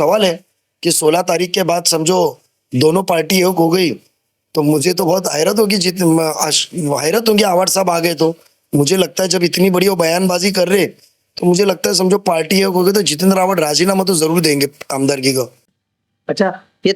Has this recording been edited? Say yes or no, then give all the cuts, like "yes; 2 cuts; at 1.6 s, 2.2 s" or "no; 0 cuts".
no; 0 cuts